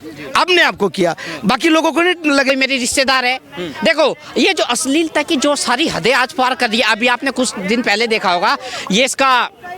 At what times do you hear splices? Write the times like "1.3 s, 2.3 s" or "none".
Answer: 2.5 s